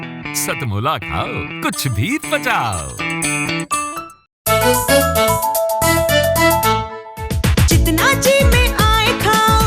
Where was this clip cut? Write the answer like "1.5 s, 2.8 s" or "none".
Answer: 4.3 s